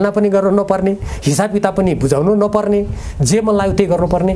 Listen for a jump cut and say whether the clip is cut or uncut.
uncut